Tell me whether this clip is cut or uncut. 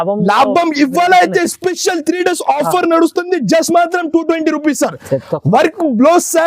uncut